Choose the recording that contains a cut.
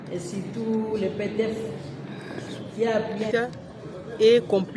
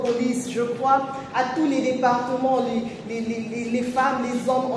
first; 1 cut; at 3.2 s

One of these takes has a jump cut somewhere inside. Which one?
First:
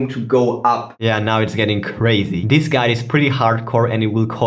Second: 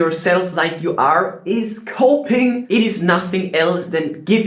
first; 2 cuts; at 0.9 s, 2.4 s

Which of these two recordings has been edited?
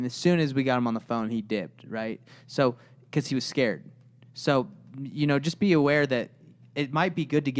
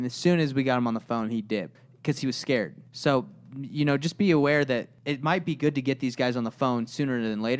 second; 3 cuts; at 1.8 s, 2.8 s, 5.0 s

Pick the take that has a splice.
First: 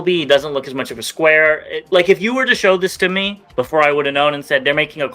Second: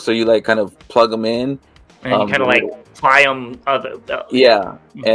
first; 1 cut; at 1.7 s

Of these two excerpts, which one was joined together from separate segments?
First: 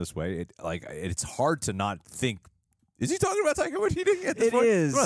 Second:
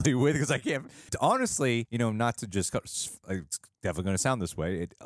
second; 3 cuts; at 1.1 s, 1.9 s, 3.2 s

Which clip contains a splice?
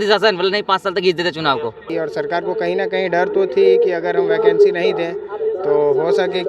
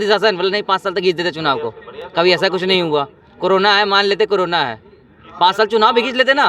first; 1 cut; at 1.9 s

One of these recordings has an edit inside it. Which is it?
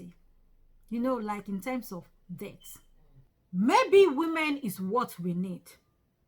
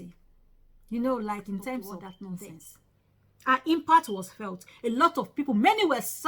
second; 1 cut; at 2.2 s

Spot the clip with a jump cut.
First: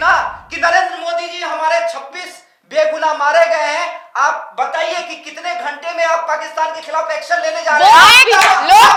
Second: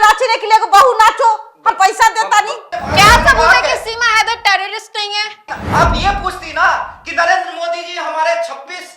second; 2 cuts; at 2.7 s, 5.5 s

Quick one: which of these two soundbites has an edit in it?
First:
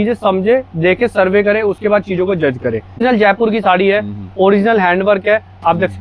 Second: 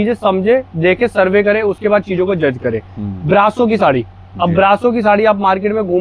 first; 1 cut; at 3.0 s

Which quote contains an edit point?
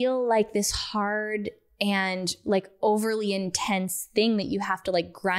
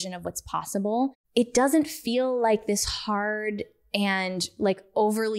second; 1 cut; at 1.2 s

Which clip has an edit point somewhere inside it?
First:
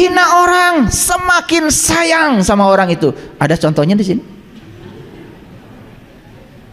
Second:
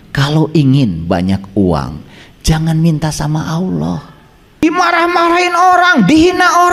second; 1 cut; at 4.6 s

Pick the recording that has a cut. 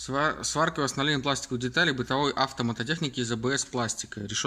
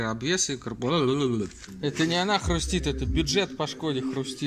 second; 1 cut; at 1.6 s

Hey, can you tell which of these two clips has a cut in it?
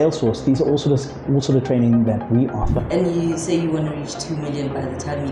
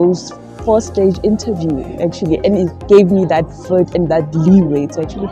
first; 1 cut; at 2.7 s

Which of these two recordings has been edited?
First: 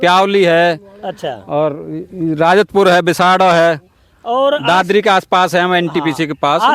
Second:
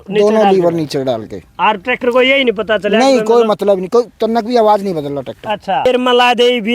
second; 1 cut; at 5.8 s

